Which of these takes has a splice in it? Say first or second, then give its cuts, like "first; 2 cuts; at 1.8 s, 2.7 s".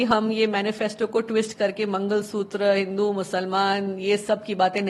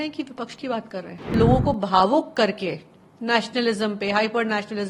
second; 1 cut; at 1.3 s